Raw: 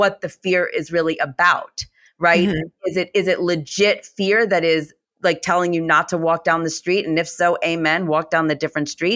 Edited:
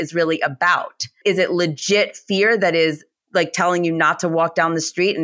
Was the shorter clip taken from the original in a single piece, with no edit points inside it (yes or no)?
no